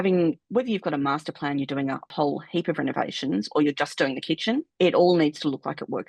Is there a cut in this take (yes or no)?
yes